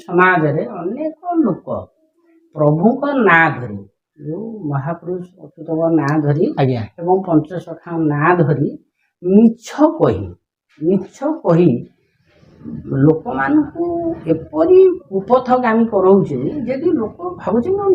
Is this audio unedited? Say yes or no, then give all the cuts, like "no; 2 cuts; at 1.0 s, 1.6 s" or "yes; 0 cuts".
yes; 0 cuts